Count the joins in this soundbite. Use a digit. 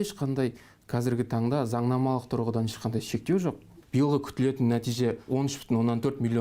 2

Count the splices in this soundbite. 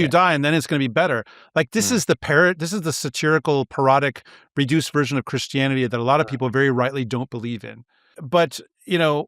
1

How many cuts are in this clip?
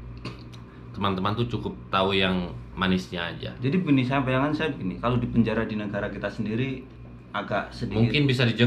0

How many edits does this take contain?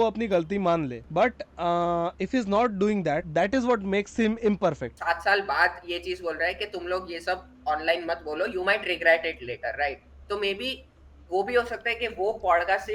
3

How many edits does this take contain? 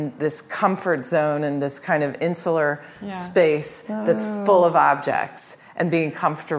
0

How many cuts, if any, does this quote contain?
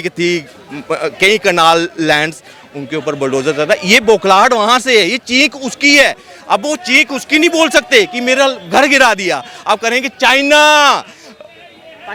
0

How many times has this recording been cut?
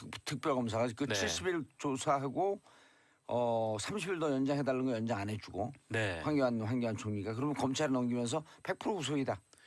1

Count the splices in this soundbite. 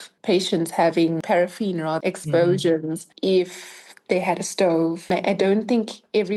0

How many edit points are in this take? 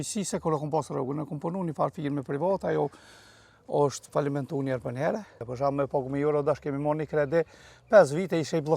1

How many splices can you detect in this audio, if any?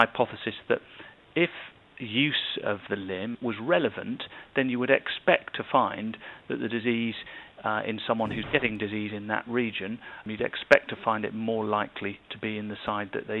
2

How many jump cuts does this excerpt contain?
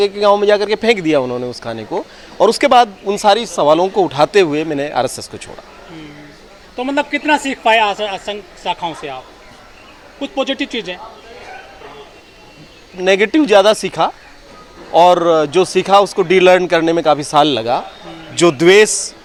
0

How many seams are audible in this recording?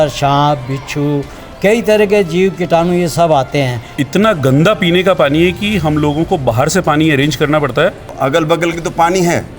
2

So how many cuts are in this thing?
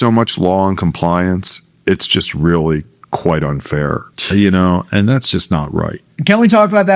1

